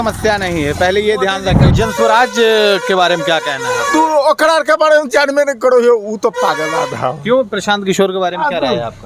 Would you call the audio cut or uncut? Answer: cut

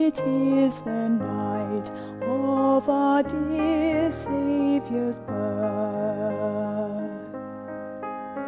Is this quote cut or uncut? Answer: cut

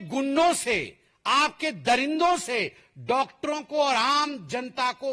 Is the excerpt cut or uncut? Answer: uncut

